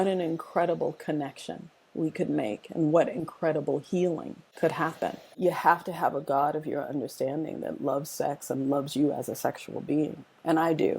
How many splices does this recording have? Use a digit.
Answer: 1